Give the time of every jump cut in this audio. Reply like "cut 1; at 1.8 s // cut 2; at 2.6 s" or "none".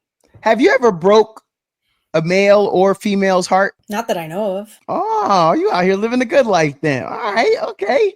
cut 1; at 3.8 s // cut 2; at 4.7 s